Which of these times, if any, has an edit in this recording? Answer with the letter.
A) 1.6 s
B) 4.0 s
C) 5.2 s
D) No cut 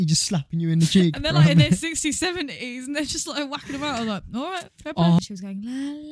C